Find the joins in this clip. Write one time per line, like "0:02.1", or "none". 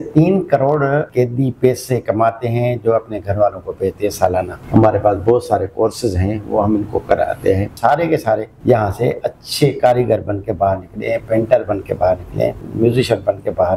0:01.1
0:04.6
0:07.7
0:08.5
0:12.6